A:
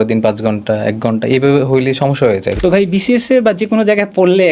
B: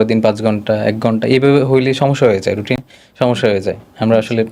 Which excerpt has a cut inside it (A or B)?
A